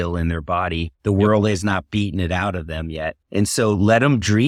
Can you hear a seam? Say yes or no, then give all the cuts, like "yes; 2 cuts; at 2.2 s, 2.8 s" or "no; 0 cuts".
no; 0 cuts